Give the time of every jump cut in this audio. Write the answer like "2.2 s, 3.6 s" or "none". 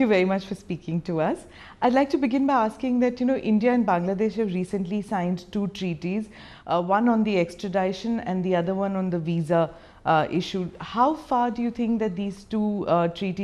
11.0 s

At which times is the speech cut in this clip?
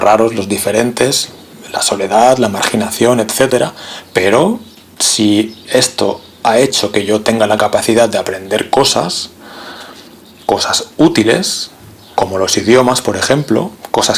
none

